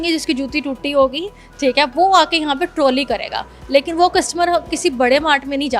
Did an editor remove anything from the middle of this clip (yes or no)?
no